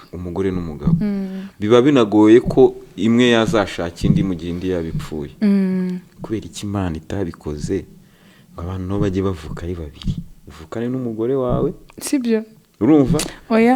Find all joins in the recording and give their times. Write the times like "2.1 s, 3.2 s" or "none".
none